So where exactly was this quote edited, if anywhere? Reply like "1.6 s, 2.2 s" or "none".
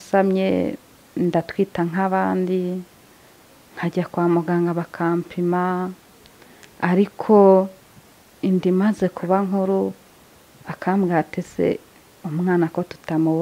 none